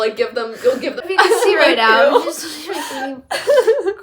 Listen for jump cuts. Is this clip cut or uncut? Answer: cut